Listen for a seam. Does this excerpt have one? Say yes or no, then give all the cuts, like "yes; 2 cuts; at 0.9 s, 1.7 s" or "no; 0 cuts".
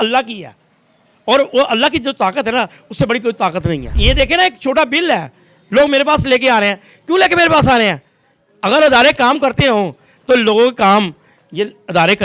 yes; 1 cut; at 4.0 s